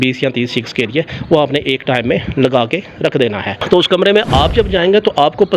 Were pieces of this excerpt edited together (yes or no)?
yes